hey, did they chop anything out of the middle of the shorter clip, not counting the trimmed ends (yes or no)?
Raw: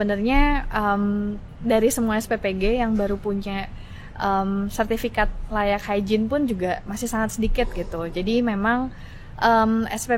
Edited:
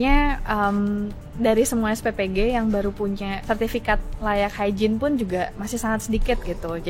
yes